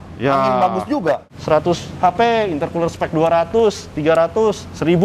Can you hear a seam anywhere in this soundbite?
yes; 1 cut; at 1.3 s

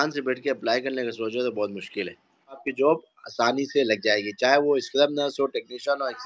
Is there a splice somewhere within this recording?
yes; 1 cut; at 2.7 s

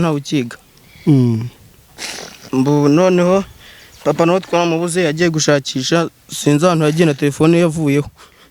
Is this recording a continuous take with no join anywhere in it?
yes; 0 cuts

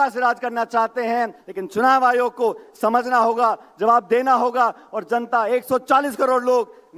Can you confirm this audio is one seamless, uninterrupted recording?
no; 1 cut; at 1.4 s

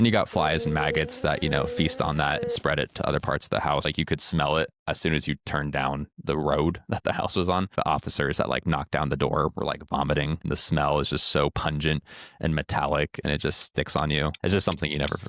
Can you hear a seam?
yes; 5 cuts; at 3.9 s, 4.8 s, 7.7 s, 10.4 s, 14.4 s

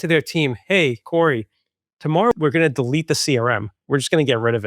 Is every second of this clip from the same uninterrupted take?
no; 2 cuts; at 2.3 s, 3.8 s

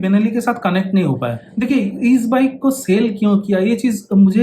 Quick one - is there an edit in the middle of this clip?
yes; 1 cut; at 1.4 s

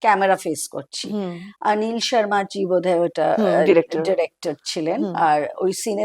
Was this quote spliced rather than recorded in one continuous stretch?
no; 0 cuts

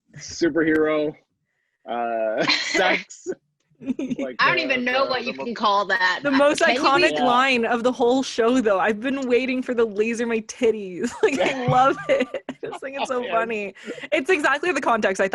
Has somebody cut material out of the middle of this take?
no; 0 cuts

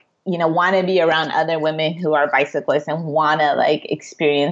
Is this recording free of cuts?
yes; 0 cuts

